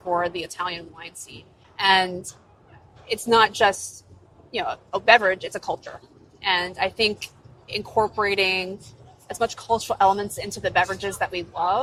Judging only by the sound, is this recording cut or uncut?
uncut